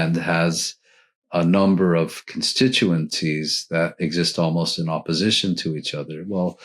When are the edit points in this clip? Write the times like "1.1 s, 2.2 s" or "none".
3.2 s